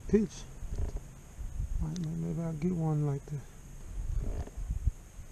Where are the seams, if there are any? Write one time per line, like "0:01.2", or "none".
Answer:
0:03.8

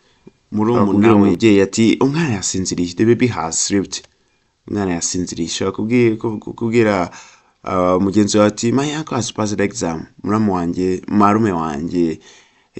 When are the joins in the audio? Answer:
0:00.9

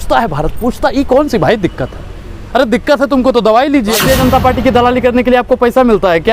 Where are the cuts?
0:04.0

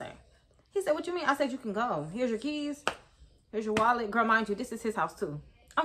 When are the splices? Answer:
none

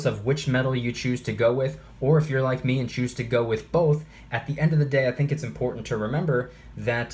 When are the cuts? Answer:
none

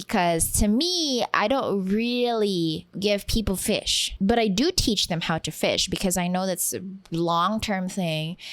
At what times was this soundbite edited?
0:02.9
0:04.0

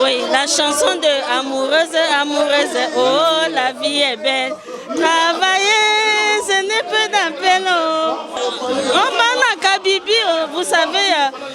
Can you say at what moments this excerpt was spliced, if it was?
0:08.3

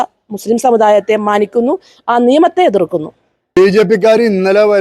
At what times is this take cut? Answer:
0:03.6

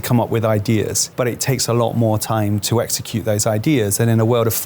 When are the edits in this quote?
0:01.0

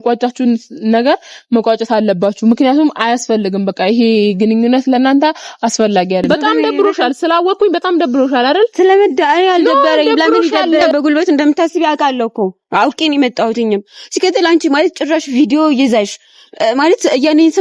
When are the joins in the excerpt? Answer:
0:06.3
0:10.9

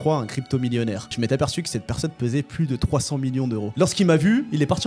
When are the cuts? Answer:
0:01.1
0:03.7

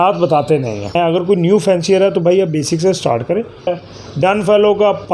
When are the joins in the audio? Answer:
0:01.0
0:03.8

